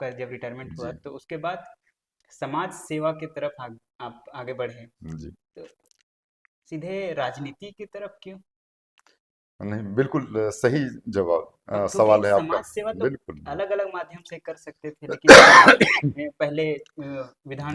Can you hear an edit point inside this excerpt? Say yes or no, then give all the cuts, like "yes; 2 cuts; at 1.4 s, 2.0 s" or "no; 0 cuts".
no; 0 cuts